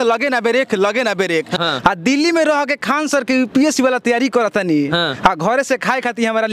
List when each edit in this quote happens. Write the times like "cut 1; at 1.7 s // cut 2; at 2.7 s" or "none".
cut 1; at 1.6 s